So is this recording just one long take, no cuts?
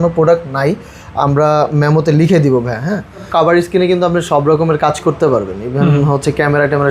no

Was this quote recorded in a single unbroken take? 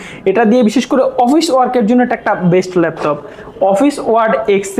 yes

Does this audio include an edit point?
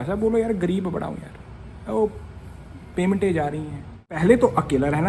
yes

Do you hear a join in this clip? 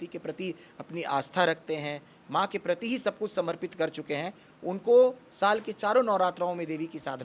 no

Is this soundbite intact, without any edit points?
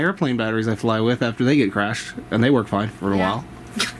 yes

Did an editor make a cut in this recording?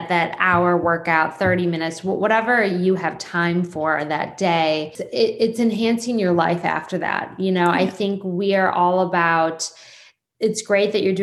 no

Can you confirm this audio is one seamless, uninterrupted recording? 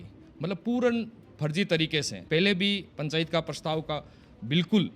no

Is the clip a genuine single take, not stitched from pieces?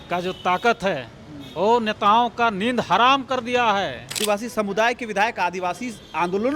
no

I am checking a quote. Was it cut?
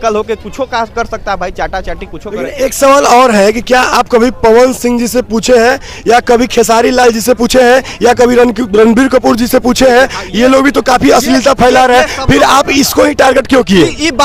no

